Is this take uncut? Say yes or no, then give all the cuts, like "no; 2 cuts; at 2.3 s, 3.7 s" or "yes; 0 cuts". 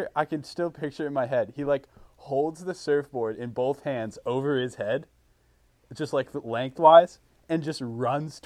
yes; 0 cuts